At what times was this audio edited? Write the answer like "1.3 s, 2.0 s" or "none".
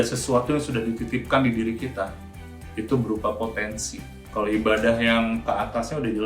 none